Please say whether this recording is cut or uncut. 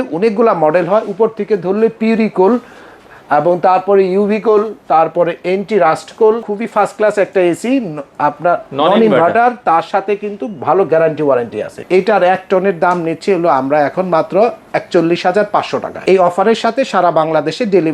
cut